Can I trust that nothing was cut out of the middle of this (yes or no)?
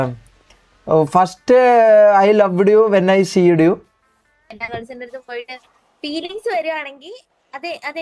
no